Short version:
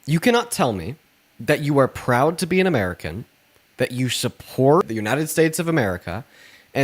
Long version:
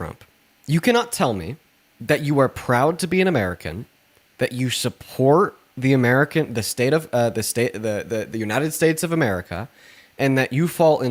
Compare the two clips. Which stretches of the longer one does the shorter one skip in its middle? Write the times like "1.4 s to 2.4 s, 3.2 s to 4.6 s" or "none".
5.4 s to 8.3 s